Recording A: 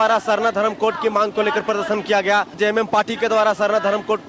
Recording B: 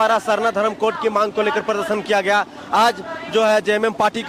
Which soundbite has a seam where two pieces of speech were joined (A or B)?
A